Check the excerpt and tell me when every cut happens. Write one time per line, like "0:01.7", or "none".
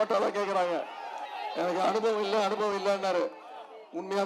0:01.2